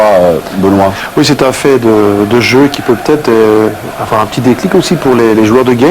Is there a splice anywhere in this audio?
yes; 1 cut; at 4.4 s

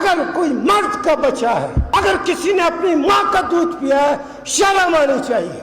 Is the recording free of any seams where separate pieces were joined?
no; 1 cut; at 1.8 s

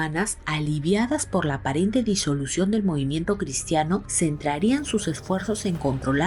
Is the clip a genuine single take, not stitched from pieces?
yes; 0 cuts

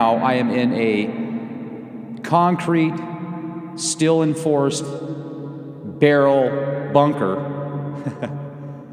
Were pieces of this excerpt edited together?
yes; 1 cut; at 1.0 s

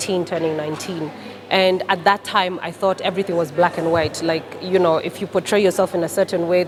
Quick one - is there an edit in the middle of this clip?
no; 0 cuts

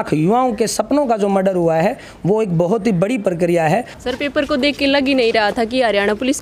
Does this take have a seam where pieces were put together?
yes; 1 cut; at 3.9 s

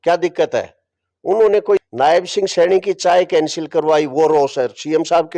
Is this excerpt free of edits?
no; 1 cut; at 1.8 s

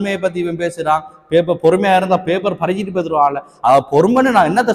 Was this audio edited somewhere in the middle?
no; 0 cuts

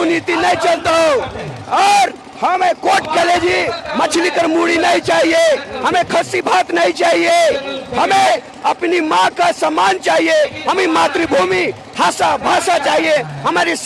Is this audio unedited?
yes; 0 cuts

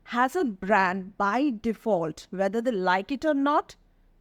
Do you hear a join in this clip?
no; 0 cuts

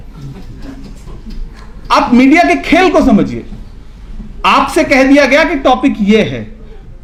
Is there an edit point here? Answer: no; 0 cuts

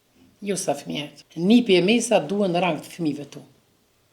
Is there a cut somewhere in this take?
yes; 1 cut; at 1.2 s

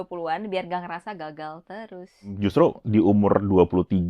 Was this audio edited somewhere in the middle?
yes; 1 cut; at 2.3 s

